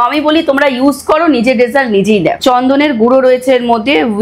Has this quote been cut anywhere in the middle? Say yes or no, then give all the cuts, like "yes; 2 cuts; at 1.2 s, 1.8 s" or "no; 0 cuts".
yes; 1 cut; at 2.3 s